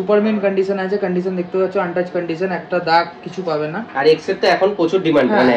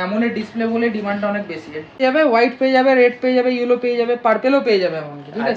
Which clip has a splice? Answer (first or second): second